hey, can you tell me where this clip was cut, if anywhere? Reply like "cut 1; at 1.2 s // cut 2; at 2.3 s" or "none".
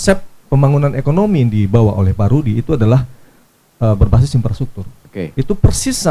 none